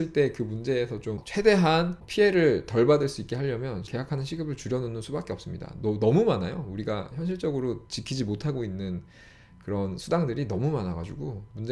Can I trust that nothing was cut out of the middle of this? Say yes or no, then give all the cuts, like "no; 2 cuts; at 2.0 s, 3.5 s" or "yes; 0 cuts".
no; 3 cuts; at 1.2 s, 2.0 s, 3.9 s